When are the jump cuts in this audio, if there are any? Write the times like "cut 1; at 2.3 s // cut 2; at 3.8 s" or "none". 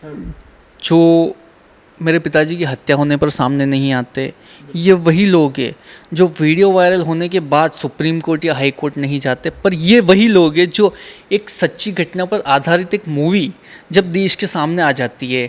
none